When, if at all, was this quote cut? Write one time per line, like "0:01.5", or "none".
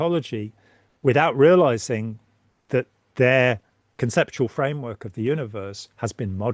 none